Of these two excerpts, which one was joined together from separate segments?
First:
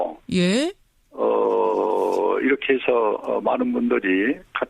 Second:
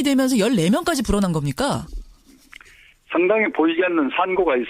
second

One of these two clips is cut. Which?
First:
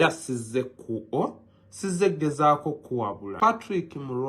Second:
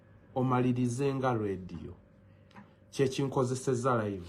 first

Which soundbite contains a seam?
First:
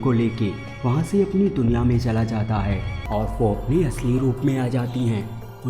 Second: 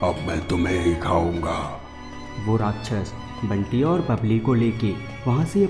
first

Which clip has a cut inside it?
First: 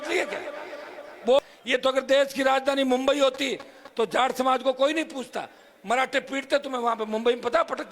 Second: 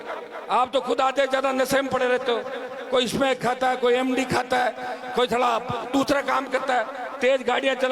first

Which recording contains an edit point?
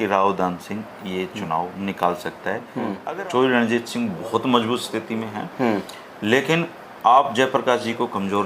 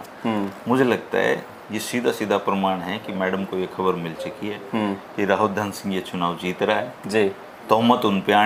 first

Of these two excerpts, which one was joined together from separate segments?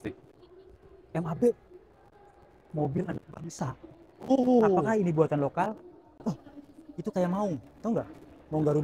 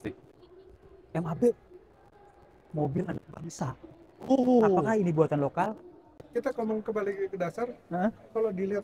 second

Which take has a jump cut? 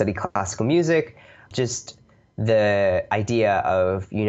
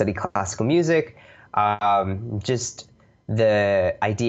first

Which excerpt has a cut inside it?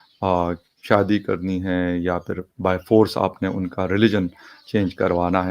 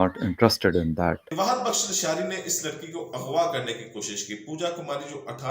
second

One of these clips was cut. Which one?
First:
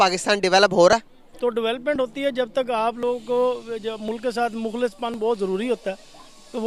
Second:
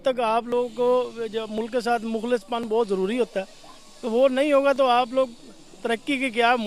first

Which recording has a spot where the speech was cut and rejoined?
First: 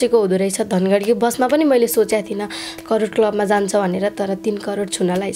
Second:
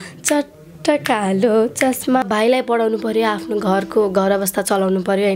second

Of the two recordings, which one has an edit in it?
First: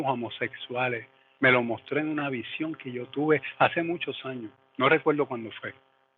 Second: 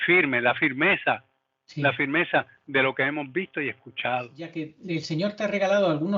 second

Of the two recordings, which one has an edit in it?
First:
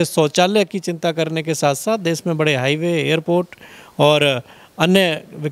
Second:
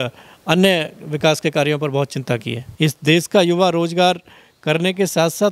second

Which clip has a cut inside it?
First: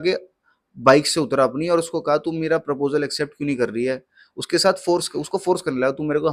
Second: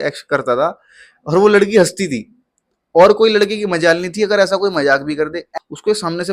second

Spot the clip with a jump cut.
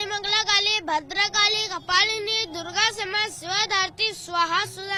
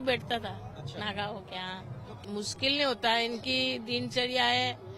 second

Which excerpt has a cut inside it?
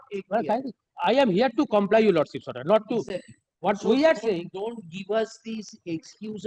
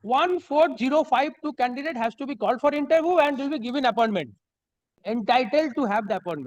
second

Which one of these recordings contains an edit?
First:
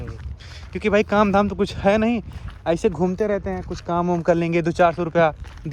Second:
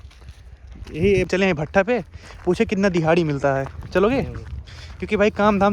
second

